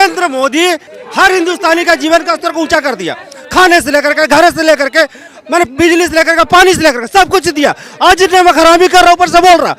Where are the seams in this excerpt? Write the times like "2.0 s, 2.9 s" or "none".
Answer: 0.9 s